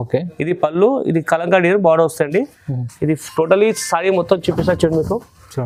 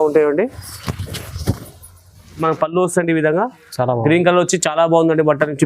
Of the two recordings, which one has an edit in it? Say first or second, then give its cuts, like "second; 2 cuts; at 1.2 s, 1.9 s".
second; 1 cut; at 2.4 s